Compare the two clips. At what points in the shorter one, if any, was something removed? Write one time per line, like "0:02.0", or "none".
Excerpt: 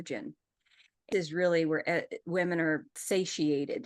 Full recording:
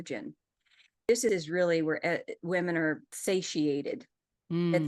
0:01.1